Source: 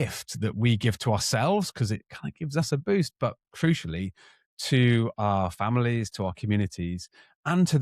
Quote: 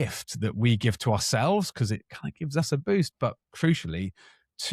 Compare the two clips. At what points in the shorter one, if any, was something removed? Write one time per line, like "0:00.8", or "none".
none